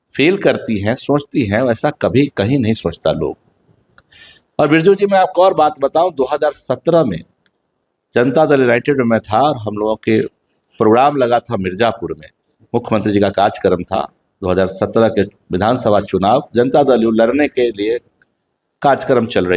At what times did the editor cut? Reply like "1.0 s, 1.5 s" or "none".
none